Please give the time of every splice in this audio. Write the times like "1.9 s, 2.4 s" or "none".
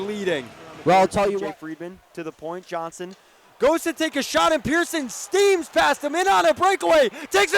1.4 s